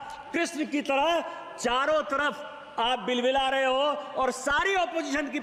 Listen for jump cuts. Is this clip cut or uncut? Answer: uncut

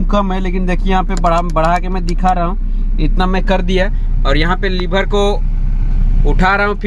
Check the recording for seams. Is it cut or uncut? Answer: uncut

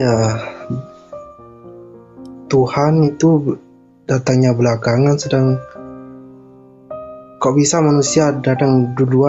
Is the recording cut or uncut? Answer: uncut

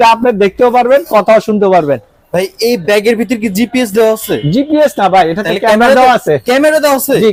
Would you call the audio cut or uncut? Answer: uncut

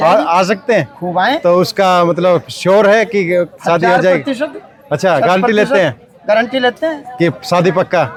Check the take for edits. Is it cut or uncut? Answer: uncut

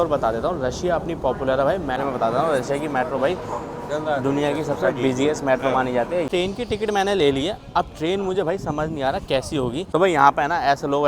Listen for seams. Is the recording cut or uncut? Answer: cut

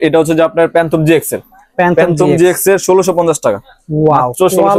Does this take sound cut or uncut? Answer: uncut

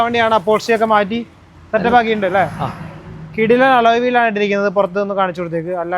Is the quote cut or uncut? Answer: uncut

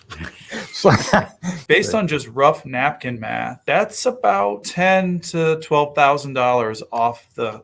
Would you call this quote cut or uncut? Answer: cut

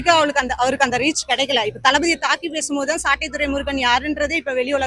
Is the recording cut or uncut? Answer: uncut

